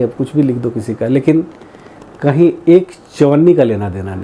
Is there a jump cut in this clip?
no; 0 cuts

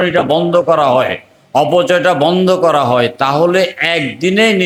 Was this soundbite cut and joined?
no; 0 cuts

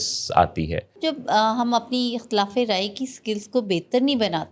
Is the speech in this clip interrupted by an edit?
yes; 1 cut; at 0.9 s

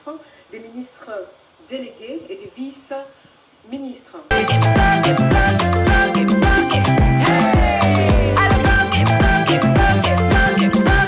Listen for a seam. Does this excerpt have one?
yes; 1 cut; at 4.3 s

